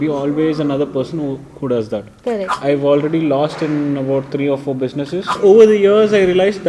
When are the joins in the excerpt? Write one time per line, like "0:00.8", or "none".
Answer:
0:02.6
0:05.3

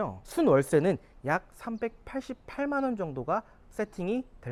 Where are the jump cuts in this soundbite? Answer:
none

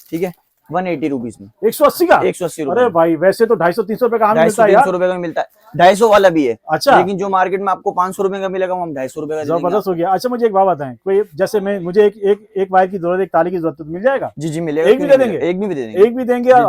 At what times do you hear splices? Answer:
none

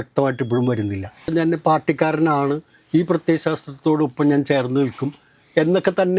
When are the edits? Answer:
0:01.3

